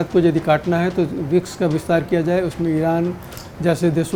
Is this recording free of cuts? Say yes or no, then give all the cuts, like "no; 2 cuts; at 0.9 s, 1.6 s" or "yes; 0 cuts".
yes; 0 cuts